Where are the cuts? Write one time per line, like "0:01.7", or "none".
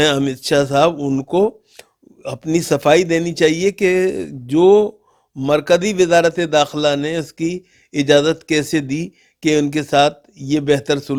none